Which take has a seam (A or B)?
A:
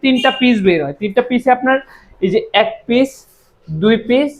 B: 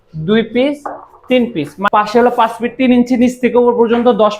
B